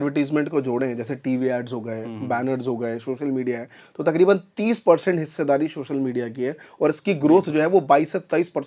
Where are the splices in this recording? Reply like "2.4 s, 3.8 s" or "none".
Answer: none